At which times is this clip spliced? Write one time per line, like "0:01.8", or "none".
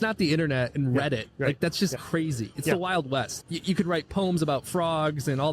0:02.0
0:03.3